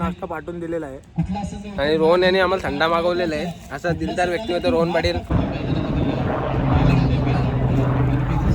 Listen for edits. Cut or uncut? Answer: cut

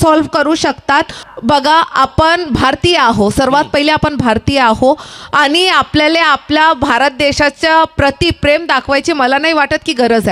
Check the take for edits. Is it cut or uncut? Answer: cut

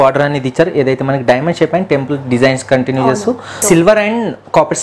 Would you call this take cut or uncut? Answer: cut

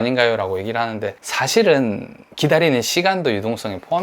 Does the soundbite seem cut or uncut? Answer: cut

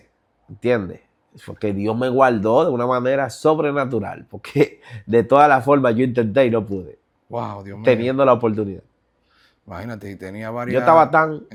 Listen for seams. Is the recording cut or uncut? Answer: uncut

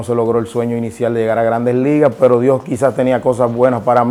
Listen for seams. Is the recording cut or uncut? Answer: uncut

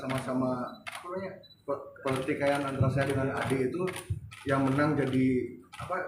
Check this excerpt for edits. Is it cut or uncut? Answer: uncut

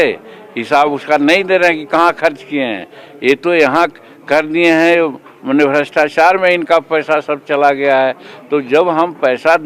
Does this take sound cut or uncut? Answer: uncut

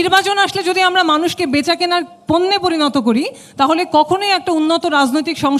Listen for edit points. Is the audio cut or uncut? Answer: uncut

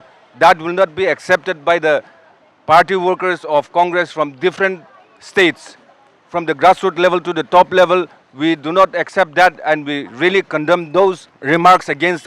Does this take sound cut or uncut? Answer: cut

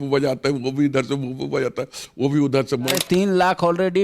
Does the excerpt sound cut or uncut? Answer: cut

